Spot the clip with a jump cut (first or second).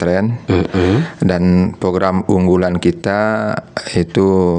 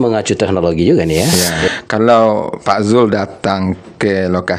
second